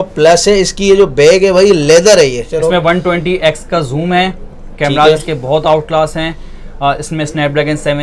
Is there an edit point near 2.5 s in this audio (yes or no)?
yes